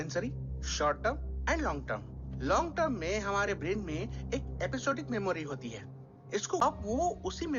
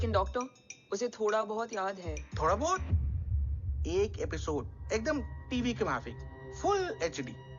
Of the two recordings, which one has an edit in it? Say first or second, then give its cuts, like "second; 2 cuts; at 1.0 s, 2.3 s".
first; 1 cut; at 6.6 s